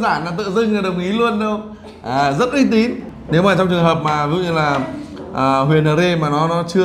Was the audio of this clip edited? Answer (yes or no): yes